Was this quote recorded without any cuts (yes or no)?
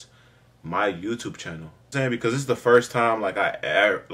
no